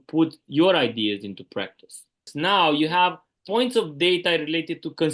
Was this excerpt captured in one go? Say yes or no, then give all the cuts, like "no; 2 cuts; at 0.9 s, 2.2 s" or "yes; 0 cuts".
no; 2 cuts; at 2.3 s, 3.3 s